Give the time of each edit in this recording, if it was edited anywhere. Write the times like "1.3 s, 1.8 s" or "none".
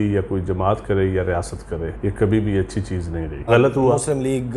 1.9 s, 3.5 s